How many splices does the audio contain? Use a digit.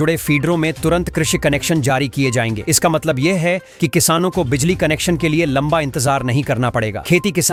0